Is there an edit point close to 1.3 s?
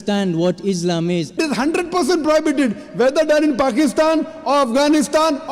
yes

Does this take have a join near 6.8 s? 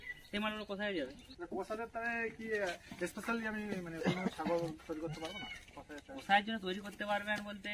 no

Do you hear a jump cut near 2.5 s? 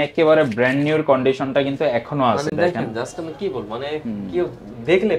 no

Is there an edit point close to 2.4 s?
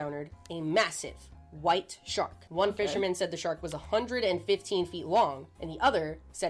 yes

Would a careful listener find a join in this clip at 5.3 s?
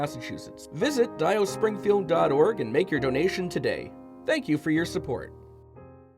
yes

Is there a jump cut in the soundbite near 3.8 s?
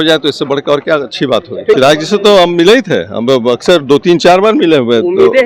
no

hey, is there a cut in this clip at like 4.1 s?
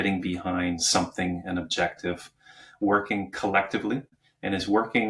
yes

